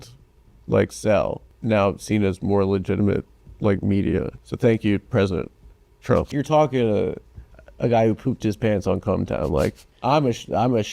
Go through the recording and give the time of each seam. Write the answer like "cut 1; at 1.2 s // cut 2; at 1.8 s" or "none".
cut 1; at 1.5 s // cut 2; at 4.4 s // cut 3; at 6.3 s // cut 4; at 9.9 s